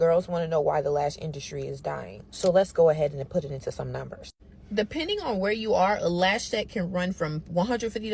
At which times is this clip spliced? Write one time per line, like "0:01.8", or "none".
none